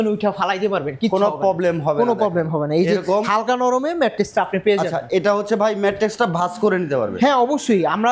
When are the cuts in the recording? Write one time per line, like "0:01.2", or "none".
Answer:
none

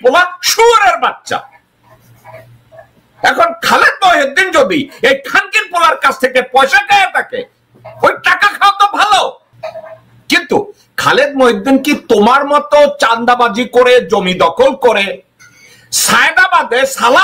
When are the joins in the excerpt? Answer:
0:09.5

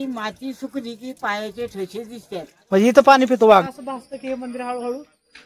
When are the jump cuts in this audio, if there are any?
0:03.6

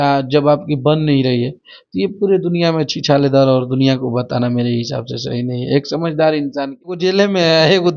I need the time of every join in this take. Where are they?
0:07.0

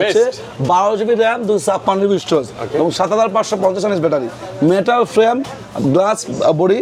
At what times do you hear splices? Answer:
none

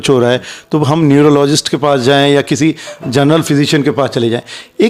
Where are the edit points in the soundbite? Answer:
none

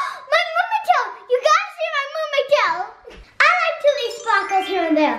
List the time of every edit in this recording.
0:02.8

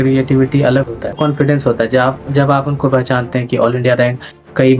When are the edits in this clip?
0:01.1

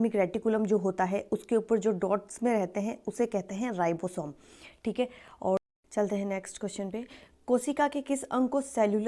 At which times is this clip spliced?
0:05.6

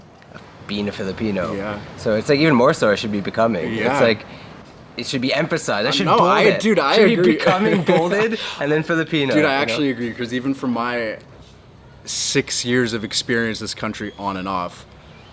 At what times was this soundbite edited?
none

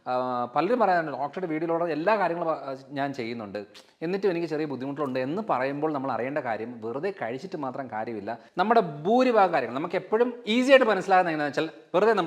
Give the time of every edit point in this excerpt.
0:08.4

